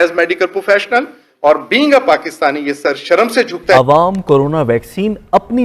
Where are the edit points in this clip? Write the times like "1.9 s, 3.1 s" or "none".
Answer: 3.8 s